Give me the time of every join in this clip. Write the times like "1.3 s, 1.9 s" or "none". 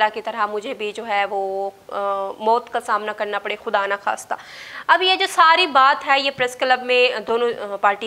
none